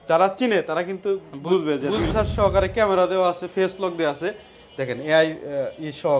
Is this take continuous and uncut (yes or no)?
no